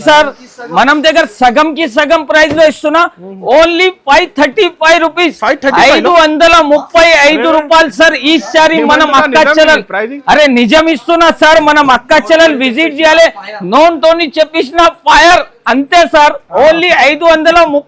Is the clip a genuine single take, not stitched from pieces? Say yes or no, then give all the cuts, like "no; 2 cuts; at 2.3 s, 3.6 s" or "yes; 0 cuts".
yes; 0 cuts